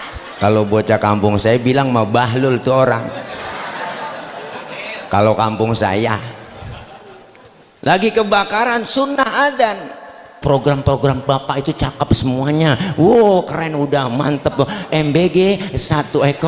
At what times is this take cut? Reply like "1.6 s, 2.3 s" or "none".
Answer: 10.4 s